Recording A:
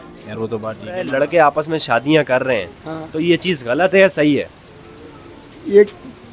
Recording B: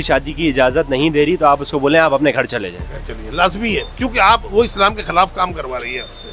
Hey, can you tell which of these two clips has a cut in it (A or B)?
A